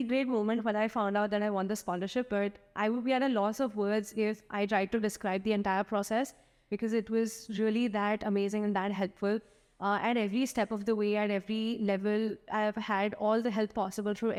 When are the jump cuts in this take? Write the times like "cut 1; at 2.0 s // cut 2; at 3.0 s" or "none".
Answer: none